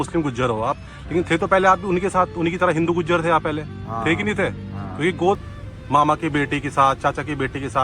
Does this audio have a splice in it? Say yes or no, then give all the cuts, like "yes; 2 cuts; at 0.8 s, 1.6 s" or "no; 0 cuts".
yes; 1 cut; at 5.4 s